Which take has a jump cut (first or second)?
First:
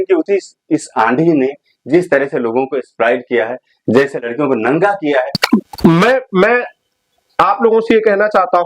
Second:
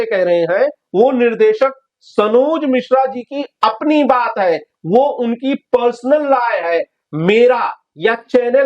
first